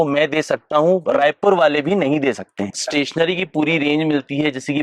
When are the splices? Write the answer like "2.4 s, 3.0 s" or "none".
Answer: 2.8 s